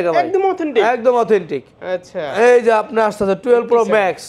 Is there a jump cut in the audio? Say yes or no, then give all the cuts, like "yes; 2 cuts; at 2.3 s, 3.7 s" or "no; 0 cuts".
no; 0 cuts